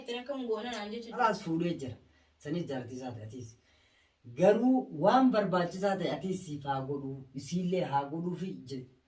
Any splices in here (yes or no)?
yes